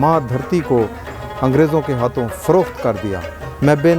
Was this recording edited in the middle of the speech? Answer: no; 0 cuts

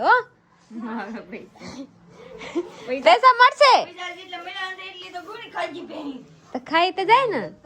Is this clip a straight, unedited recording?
yes; 0 cuts

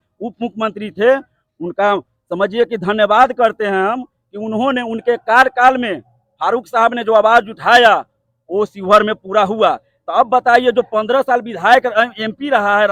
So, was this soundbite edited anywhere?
no; 0 cuts

